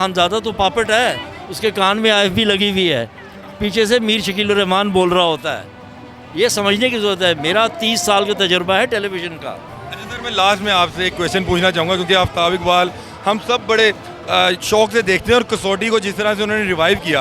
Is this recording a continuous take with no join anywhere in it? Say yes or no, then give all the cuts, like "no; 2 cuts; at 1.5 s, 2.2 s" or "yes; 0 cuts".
yes; 0 cuts